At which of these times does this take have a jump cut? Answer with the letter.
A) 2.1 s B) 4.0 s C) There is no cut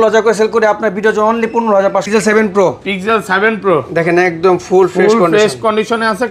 A